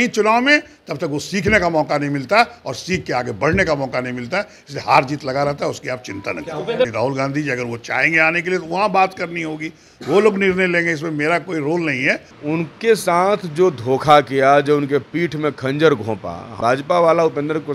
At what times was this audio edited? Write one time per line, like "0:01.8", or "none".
0:06.9
0:12.3
0:16.5